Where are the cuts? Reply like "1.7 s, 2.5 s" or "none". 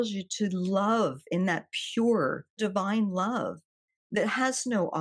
2.6 s